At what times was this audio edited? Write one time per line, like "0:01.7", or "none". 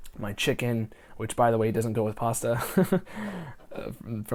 none

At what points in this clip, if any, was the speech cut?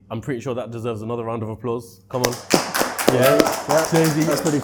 none

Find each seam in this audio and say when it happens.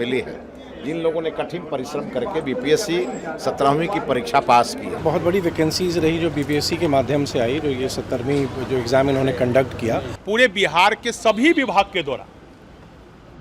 0:05.0
0:10.2

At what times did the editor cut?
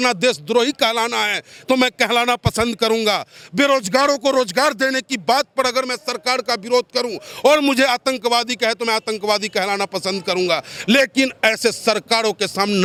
none

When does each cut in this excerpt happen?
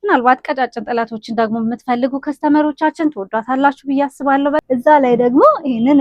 0:04.6

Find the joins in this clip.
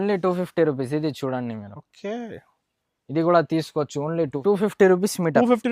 0:04.3

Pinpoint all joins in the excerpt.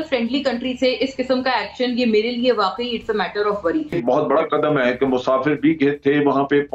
0:04.0

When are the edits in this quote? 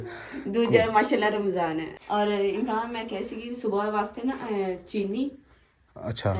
0:01.9

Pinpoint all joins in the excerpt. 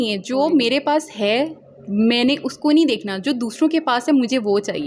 none

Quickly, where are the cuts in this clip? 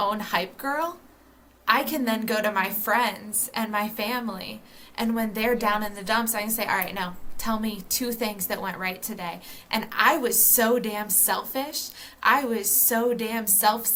none

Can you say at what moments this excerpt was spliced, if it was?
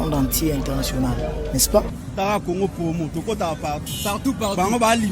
0:01.9

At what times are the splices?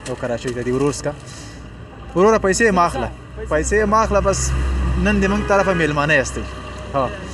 none

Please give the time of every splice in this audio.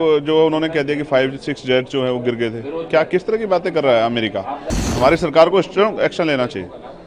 0:04.9

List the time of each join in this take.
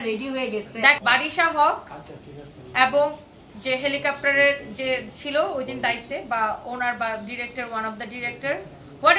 0:01.0

